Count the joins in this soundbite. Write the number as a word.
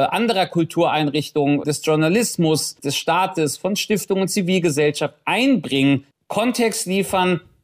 two